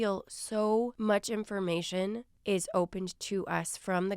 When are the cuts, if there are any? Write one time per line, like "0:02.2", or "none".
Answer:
0:00.9
0:02.3